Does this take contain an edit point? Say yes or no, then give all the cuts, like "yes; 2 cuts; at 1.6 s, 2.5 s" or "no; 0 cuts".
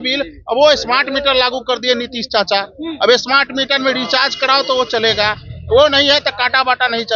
no; 0 cuts